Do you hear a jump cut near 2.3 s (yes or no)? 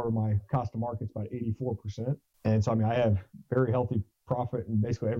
yes